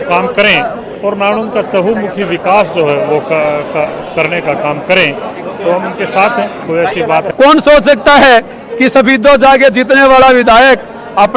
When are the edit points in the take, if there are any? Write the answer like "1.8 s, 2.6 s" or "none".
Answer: 7.3 s